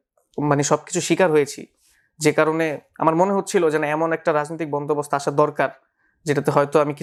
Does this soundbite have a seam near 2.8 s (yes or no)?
no